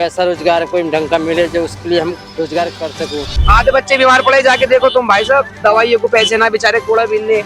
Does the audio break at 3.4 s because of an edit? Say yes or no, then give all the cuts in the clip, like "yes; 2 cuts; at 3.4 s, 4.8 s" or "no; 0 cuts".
yes; 2 cuts; at 2.2 s, 3.4 s